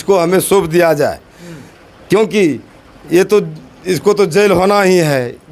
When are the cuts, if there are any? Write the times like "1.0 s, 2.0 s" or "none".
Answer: none